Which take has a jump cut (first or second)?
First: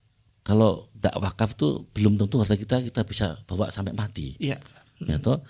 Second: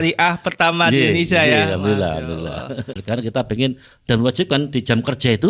second